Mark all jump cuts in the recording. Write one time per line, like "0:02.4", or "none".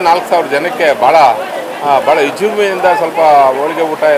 none